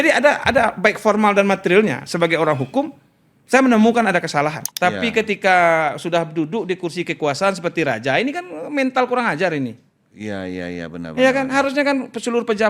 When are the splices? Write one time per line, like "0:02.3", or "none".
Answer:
0:04.6